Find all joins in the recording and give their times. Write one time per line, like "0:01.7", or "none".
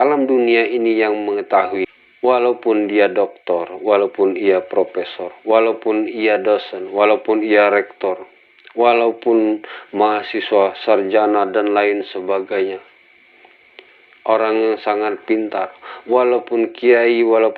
0:01.8